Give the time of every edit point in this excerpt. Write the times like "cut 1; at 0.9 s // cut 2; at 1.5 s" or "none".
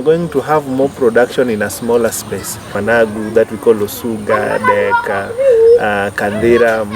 cut 1; at 2.7 s